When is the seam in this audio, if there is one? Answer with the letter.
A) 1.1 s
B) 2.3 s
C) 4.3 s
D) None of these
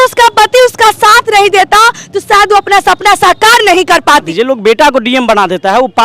C